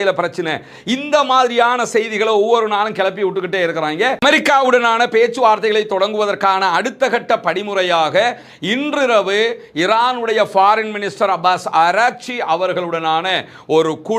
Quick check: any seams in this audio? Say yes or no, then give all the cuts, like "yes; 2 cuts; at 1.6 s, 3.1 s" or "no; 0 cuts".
yes; 1 cut; at 4.2 s